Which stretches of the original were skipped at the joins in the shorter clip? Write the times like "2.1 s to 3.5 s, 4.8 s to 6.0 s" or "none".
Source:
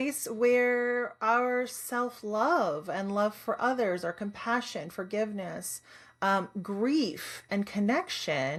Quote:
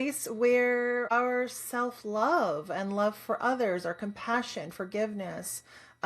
1.1 s to 1.3 s